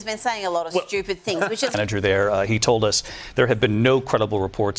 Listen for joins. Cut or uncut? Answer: cut